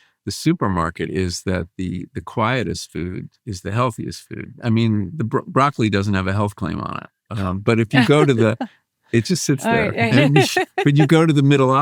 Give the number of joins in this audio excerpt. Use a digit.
0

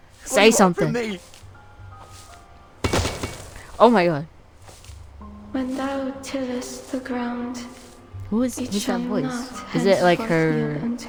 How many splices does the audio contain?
0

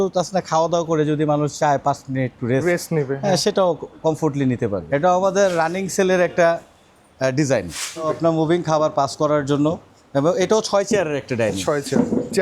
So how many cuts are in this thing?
3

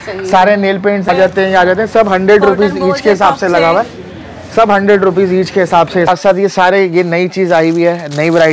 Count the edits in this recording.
2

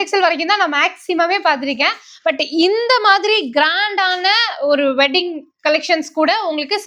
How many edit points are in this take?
0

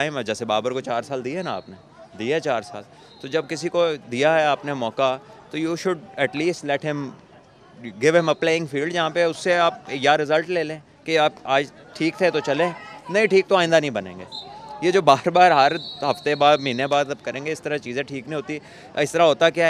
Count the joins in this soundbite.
0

